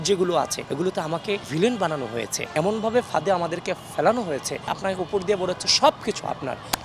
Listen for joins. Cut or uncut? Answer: cut